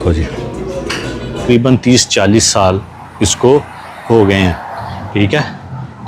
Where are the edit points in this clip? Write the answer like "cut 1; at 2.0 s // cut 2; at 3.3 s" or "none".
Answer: cut 1; at 1.4 s